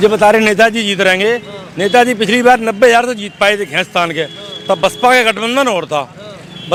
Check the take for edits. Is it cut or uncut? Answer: uncut